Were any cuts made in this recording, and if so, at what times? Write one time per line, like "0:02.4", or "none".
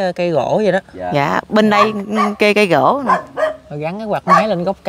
none